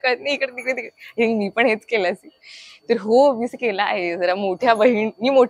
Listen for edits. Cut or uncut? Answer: uncut